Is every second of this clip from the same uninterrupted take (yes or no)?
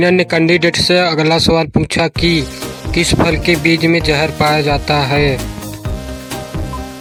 yes